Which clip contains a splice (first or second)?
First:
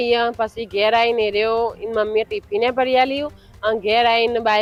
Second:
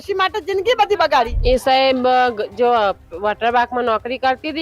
second